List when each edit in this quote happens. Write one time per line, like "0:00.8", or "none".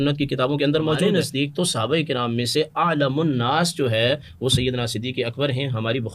0:01.1